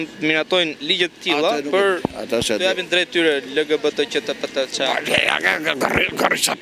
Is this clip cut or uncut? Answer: uncut